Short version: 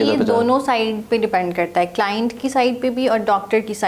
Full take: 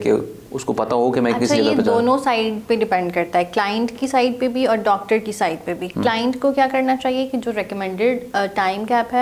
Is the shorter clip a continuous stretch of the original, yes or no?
yes